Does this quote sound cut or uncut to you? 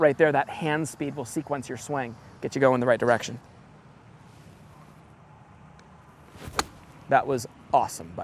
cut